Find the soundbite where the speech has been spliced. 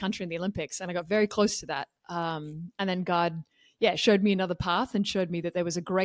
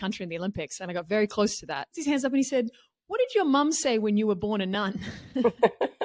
second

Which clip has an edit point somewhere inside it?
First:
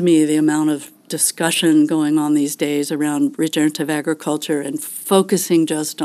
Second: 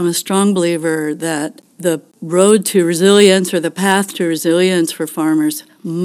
second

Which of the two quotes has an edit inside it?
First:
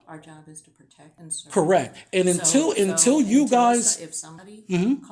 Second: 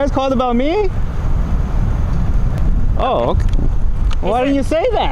first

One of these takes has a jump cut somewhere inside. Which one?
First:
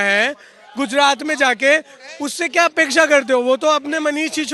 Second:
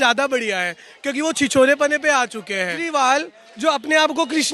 second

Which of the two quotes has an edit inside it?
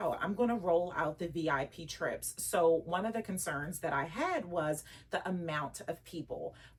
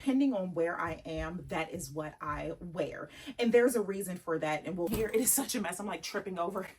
second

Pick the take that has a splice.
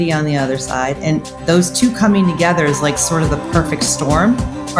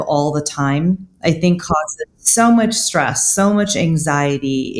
second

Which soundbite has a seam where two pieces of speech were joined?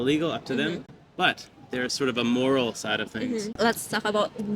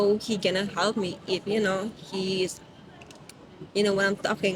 first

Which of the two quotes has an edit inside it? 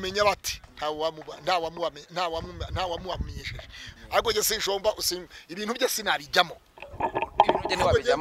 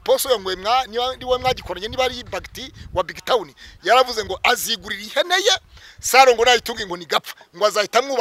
first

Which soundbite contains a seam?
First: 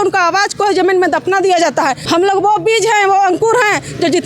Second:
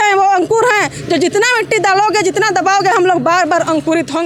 first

